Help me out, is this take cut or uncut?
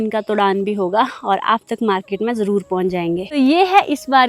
uncut